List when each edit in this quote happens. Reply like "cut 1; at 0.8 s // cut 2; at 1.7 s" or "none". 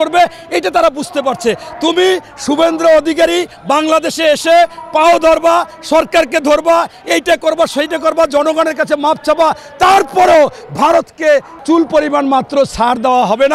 cut 1; at 11.5 s